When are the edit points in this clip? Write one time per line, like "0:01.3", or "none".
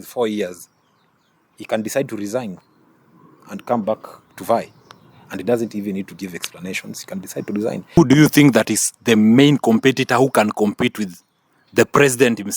0:08.0

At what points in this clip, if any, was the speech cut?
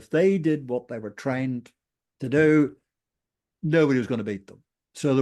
none

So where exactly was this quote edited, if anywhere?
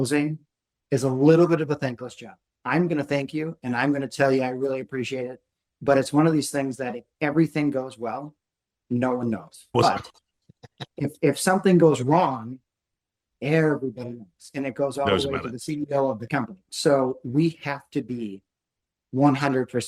none

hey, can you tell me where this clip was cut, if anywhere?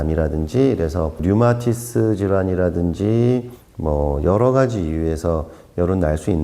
0:01.2
0:03.6

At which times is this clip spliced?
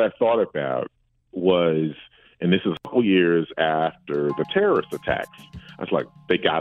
none

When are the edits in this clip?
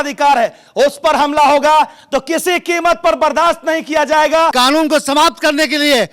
0:04.5

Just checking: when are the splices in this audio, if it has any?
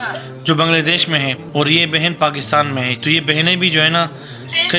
0:01.4

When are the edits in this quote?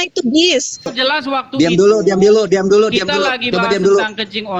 0:01.0

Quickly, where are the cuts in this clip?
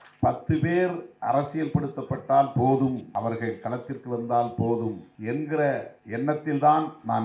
0:03.0
0:05.1
0:06.0

